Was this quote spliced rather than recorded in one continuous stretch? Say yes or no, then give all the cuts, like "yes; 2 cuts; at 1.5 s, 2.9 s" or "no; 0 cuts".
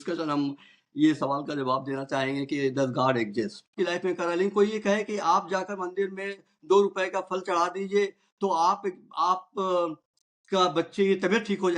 yes; 1 cut; at 3.7 s